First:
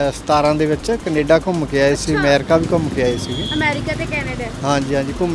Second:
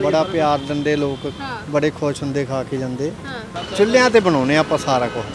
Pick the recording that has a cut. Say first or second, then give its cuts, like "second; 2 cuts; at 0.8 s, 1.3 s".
second; 1 cut; at 3.5 s